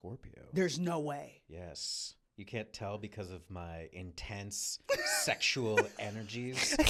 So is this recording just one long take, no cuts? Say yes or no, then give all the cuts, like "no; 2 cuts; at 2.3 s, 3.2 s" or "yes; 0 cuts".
yes; 0 cuts